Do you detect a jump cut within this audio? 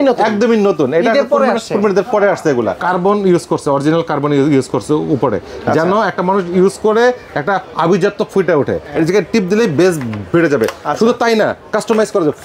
yes; 2 cuts; at 2.8 s, 8.9 s

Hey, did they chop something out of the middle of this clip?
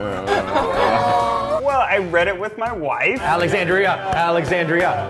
yes; 1 cut; at 3.2 s

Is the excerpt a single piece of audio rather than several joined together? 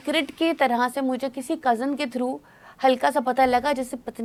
yes; 0 cuts

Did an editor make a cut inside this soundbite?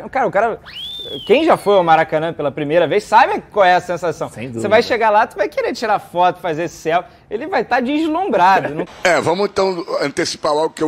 yes; 1 cut; at 8.8 s

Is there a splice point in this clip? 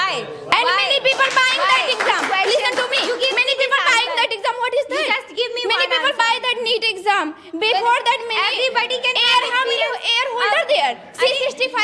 no; 0 cuts

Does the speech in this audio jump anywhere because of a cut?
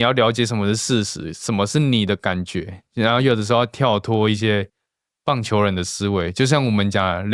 no; 0 cuts

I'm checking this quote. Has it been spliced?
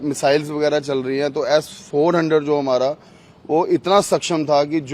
no; 0 cuts

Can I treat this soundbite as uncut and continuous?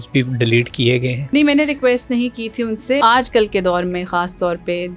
no; 2 cuts; at 1.2 s, 3.0 s

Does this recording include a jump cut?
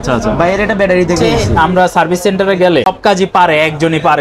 yes; 2 cuts; at 1.3 s, 2.9 s

